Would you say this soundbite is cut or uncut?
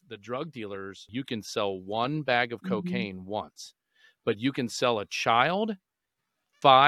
cut